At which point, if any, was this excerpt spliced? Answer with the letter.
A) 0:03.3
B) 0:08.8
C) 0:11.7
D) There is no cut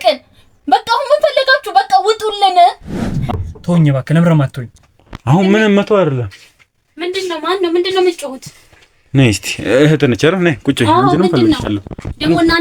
A